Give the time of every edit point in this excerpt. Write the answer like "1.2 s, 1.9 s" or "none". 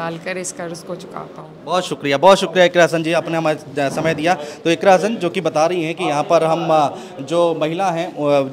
none